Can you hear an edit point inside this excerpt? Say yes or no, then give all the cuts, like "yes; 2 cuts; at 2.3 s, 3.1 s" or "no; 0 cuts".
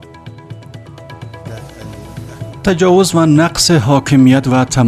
yes; 1 cut; at 1.0 s